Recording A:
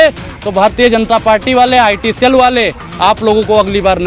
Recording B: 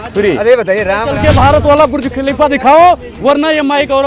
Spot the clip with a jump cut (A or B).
B